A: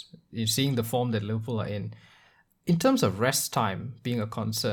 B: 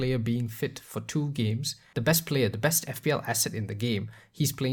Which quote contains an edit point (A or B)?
B